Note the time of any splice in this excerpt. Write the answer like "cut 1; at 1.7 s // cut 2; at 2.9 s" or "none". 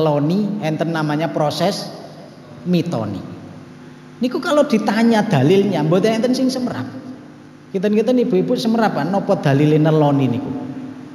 none